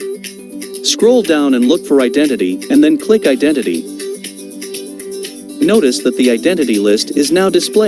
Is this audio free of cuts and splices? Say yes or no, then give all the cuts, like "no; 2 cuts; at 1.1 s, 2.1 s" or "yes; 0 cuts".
yes; 0 cuts